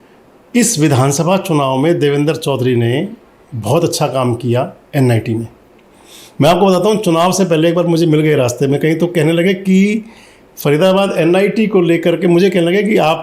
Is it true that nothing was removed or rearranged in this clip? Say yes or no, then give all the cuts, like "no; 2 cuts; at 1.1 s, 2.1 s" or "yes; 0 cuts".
yes; 0 cuts